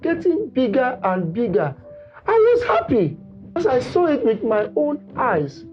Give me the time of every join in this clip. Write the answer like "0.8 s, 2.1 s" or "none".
3.6 s